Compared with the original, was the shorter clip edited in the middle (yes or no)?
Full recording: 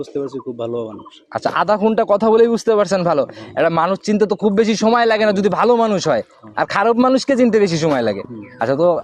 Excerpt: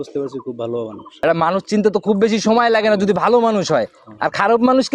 yes